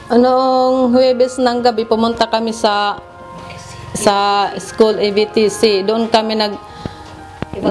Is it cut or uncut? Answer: uncut